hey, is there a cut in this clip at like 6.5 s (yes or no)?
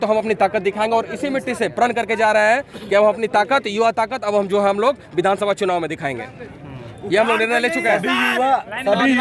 no